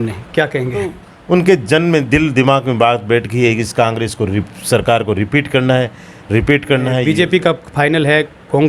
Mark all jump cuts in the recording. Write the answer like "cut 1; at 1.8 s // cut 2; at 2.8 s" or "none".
cut 1; at 1.1 s // cut 2; at 7.0 s